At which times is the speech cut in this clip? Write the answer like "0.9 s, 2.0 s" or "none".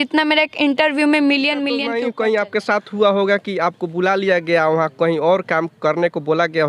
1.9 s